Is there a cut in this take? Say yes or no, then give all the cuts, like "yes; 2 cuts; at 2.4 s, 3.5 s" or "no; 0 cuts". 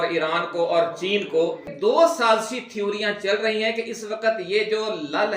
yes; 1 cut; at 1.7 s